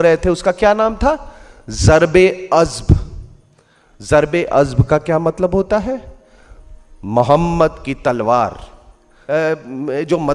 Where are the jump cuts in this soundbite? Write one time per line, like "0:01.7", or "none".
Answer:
0:09.1

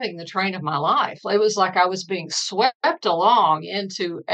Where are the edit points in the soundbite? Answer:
none

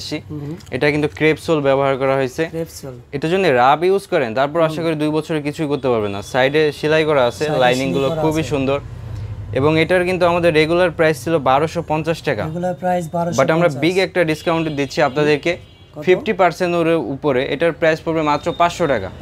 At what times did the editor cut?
none

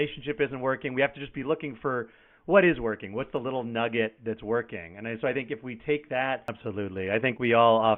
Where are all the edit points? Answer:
0:06.6

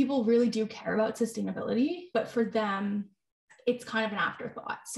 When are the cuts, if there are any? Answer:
0:02.0

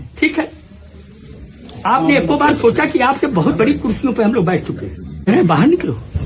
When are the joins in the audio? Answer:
0:05.3

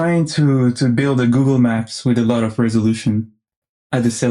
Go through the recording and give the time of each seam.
none

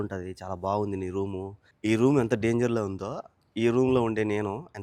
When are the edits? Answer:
0:01.6

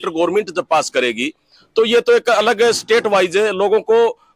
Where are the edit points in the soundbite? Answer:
none

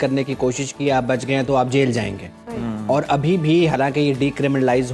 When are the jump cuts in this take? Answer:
none

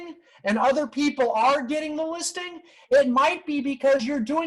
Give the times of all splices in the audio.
none

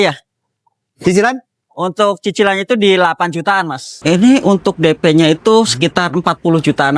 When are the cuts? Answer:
0:03.9

